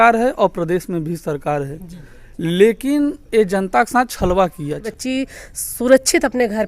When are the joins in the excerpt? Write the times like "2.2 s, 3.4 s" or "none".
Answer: 4.9 s